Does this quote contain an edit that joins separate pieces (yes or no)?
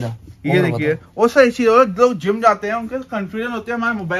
no